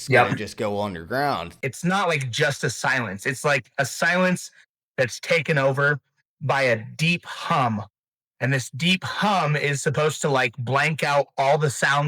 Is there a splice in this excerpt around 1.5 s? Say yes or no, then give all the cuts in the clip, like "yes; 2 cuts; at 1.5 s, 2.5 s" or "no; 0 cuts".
yes; 1 cut; at 1.5 s